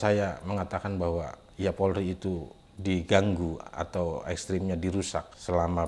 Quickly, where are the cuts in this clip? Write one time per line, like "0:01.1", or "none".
none